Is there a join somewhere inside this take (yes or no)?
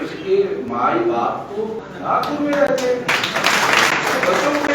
yes